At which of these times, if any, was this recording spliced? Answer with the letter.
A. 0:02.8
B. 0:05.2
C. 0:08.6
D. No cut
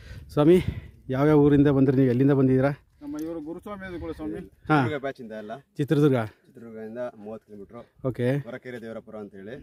D